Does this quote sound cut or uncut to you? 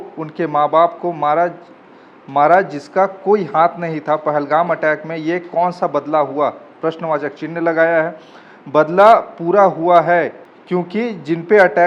uncut